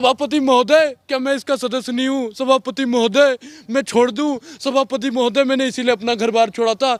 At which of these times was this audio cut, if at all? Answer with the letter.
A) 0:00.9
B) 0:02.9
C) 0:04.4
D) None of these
D